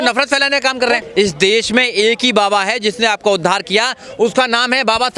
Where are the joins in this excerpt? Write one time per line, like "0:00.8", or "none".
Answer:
0:01.0